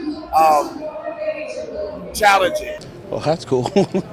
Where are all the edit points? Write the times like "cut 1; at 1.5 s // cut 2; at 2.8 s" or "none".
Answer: cut 1; at 2.9 s